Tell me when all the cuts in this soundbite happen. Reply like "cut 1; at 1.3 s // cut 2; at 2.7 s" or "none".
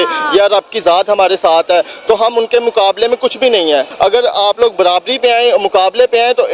none